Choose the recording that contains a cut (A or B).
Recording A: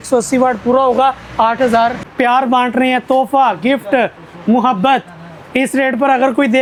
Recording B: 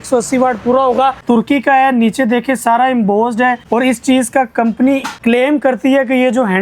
B